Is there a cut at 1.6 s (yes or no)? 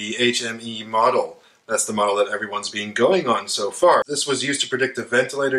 no